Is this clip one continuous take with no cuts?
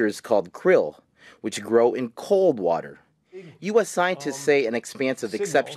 no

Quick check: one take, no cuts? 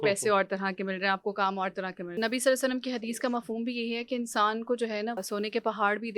no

